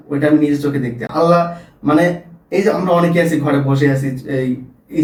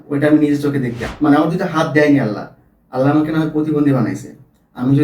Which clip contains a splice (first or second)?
second